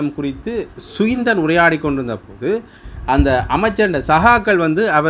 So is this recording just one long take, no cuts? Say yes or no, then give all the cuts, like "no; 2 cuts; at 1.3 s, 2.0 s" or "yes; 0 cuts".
yes; 0 cuts